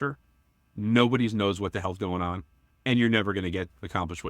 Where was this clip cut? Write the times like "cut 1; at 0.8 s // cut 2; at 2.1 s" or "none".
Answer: cut 1; at 2.7 s